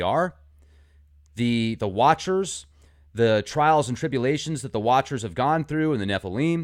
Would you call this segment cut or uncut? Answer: uncut